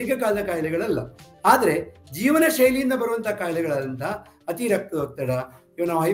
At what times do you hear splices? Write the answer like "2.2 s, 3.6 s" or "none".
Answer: none